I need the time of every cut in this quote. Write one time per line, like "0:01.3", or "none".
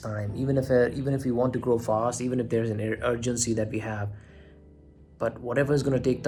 none